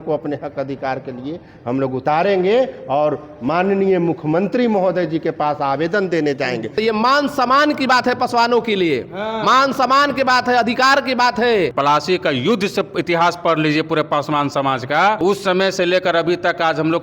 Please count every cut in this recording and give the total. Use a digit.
3